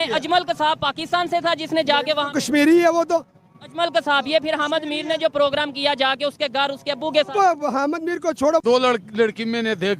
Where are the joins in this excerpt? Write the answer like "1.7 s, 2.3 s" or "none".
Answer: 8.6 s